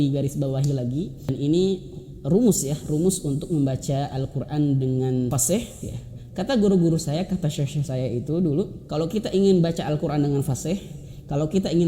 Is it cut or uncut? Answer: cut